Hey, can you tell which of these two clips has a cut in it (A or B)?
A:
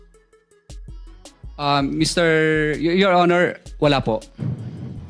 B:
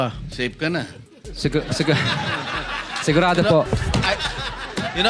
A